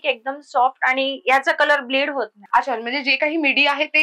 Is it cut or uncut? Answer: cut